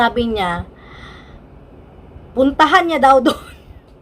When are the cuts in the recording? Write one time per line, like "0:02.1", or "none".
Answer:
none